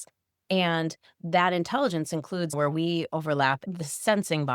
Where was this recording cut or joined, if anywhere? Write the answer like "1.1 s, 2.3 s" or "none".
3.6 s